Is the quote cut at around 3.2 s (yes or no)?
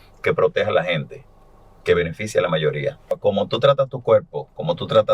yes